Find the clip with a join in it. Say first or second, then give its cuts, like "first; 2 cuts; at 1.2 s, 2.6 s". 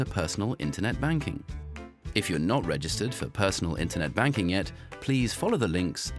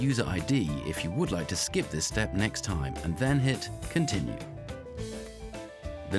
first; 1 cut; at 4.8 s